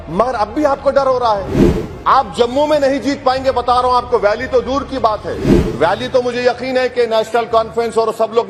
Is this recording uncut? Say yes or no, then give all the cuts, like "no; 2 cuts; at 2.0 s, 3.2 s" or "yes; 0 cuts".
yes; 0 cuts